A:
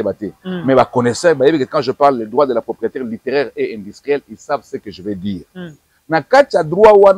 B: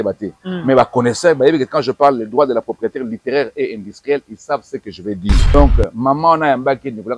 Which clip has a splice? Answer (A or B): B